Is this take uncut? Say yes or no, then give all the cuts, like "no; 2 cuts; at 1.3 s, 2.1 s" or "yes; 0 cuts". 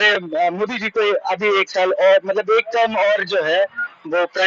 yes; 0 cuts